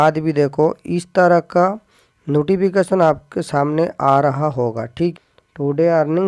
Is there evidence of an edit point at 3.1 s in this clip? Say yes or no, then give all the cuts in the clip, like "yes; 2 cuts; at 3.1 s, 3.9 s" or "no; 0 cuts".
no; 1 cut; at 5.1 s